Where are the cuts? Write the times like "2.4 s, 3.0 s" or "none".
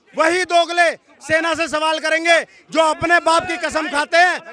none